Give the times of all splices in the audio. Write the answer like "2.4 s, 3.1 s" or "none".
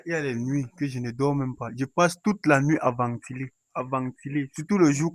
none